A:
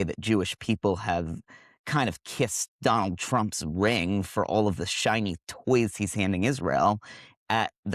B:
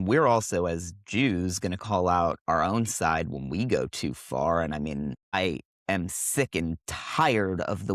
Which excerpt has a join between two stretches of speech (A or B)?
B